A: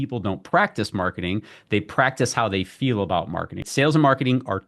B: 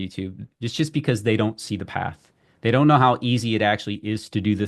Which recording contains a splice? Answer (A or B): A